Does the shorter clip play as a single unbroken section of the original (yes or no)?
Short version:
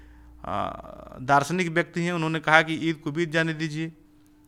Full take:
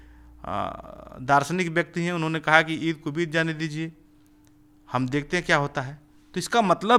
yes